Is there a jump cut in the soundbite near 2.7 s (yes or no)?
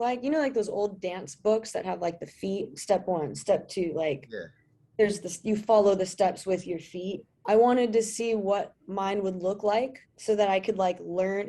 no